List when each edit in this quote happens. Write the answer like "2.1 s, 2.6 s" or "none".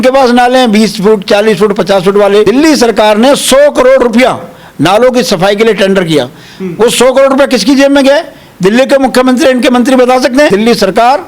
2.4 s, 10.5 s

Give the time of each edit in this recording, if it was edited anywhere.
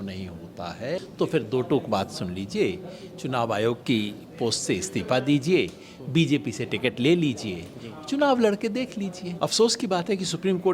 1.1 s, 9.2 s

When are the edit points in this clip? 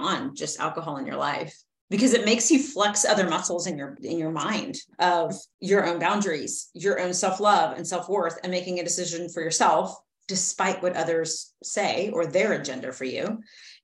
3.9 s, 5.5 s

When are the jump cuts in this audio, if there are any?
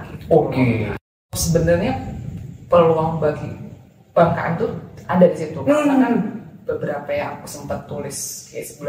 1.3 s

